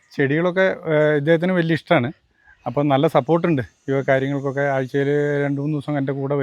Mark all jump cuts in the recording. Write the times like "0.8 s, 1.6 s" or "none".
none